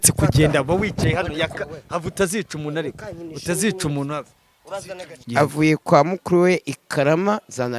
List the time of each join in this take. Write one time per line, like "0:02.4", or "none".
0:05.1

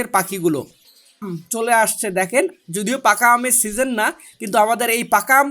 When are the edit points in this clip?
0:01.4

